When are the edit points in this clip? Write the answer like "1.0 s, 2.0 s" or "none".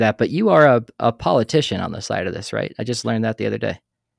none